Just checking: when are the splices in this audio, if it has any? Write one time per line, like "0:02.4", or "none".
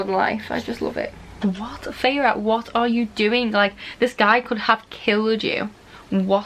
0:01.4